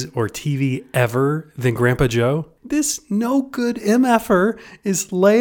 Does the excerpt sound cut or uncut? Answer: cut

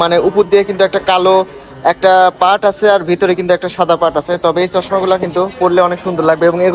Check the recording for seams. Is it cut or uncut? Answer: uncut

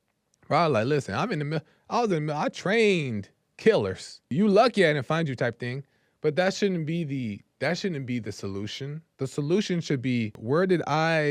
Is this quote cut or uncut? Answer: cut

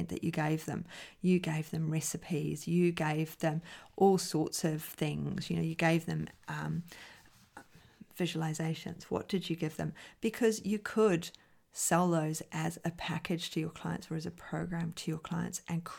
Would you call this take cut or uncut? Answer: uncut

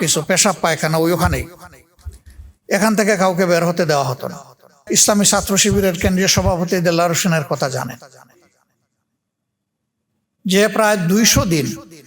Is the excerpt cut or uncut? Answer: cut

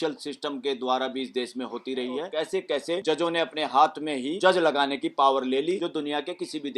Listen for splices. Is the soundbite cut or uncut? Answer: cut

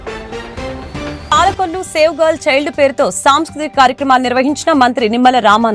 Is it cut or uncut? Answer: cut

